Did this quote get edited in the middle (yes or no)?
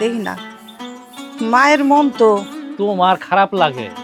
yes